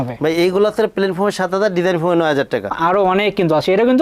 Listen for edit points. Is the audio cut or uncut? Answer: cut